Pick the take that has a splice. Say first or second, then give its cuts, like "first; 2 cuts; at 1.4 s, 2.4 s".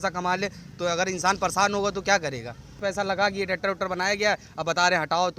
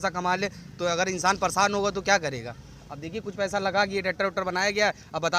first; 1 cut; at 2.7 s